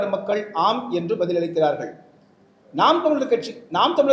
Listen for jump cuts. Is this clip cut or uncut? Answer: uncut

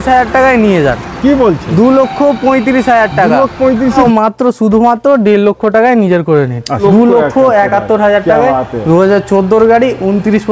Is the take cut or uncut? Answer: cut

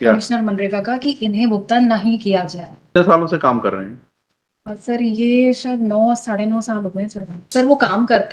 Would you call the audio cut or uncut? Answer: cut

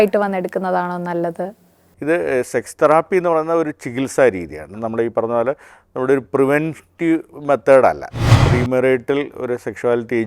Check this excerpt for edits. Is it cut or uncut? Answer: cut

